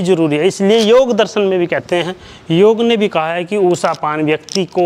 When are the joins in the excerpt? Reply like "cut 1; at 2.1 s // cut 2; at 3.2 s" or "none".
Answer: none